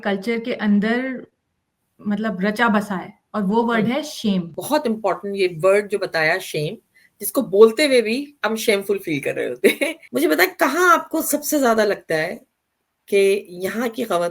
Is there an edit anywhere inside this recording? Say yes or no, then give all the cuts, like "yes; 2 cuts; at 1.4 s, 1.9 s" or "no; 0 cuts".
yes; 2 cuts; at 4.6 s, 10.0 s